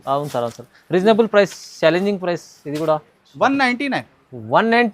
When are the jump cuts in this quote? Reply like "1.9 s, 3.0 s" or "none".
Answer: 3.1 s

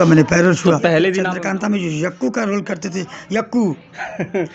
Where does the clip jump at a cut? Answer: 1.2 s

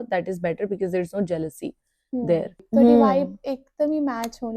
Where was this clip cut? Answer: 2.6 s

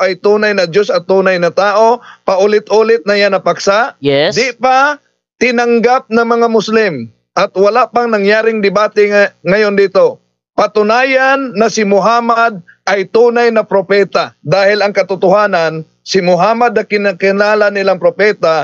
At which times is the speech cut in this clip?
14.3 s

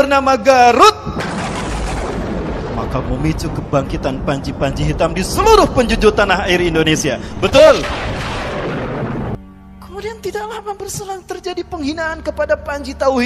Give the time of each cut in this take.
9.3 s

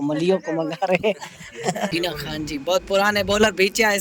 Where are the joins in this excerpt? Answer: 1.9 s

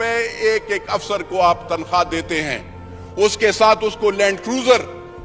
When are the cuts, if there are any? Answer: none

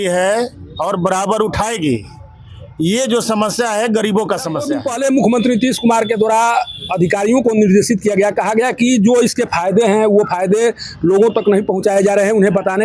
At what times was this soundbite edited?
4.7 s

